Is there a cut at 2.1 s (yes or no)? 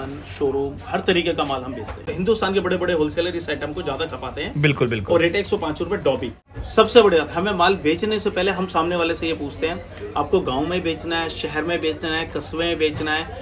yes